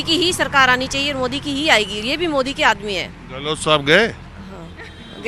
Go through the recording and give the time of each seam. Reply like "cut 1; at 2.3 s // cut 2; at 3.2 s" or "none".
none